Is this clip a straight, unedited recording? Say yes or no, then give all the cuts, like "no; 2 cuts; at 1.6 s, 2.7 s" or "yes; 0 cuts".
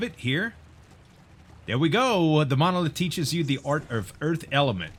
yes; 0 cuts